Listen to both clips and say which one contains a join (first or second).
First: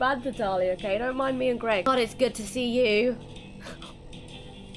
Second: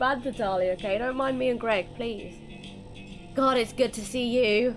first